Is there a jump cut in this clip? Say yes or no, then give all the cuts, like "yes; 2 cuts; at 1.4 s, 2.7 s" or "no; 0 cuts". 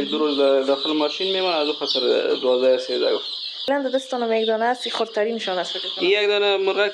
yes; 1 cut; at 3.7 s